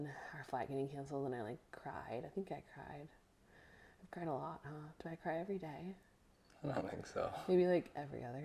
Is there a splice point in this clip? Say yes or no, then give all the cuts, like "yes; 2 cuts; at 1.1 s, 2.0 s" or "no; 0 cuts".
no; 0 cuts